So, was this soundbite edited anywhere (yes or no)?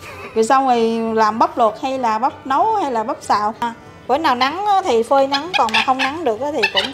yes